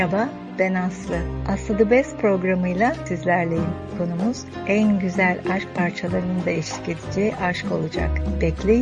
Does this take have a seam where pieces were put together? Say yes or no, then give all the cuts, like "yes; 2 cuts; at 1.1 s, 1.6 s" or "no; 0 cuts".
no; 0 cuts